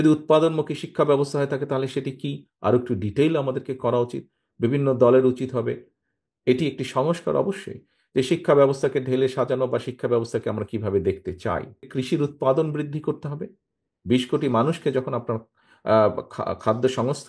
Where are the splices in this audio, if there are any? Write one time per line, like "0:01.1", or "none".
0:11.9

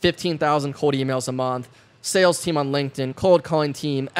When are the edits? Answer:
none

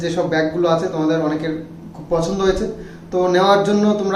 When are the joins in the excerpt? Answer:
none

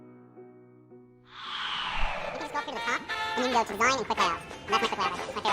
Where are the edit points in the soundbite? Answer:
0:01.2
0:02.4

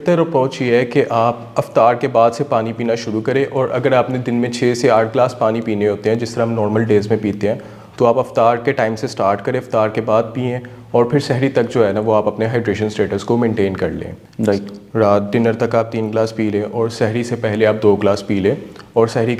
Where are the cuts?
none

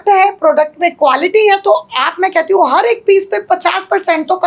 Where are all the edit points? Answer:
none

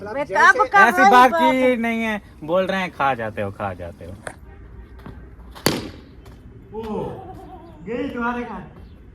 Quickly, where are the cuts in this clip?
0:04.4

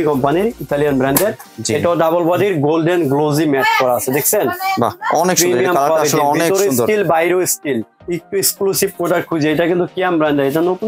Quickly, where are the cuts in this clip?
0:01.5
0:08.0

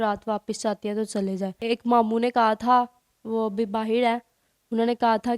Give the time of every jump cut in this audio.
0:01.6

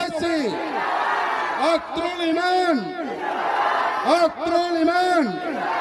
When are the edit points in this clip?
none

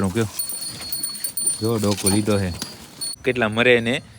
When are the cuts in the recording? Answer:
0:03.2

